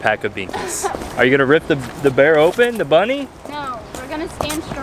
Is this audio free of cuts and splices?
no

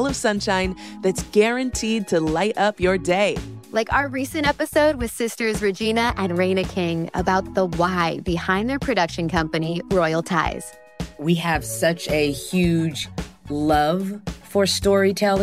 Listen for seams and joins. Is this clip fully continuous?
yes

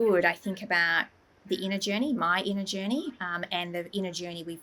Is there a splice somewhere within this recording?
no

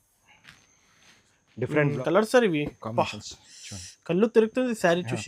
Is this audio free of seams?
no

